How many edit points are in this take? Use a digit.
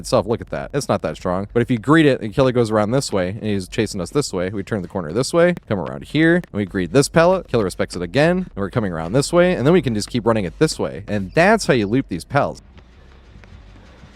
1